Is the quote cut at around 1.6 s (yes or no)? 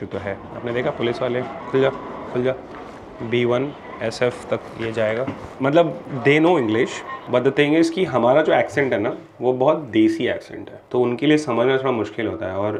no